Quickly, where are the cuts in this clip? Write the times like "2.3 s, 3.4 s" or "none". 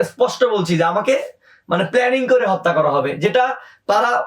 none